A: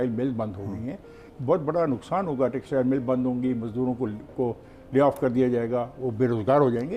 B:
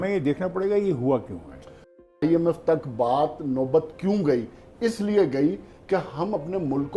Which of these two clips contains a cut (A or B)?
B